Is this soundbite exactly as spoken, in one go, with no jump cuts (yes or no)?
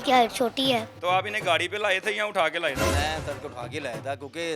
no